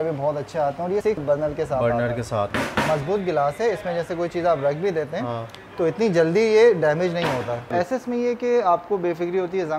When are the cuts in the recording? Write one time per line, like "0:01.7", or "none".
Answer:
0:01.2
0:02.5
0:07.7